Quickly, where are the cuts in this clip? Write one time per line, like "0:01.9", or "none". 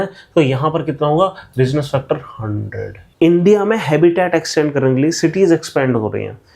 0:03.0